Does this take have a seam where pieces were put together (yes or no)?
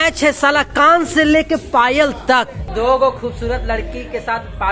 yes